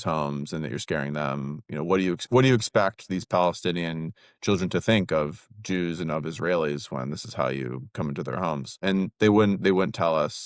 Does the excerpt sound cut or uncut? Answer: cut